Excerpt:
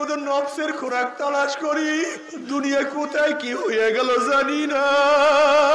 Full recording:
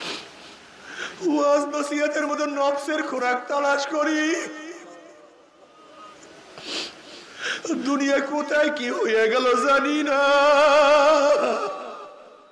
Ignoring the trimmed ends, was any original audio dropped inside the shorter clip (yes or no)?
yes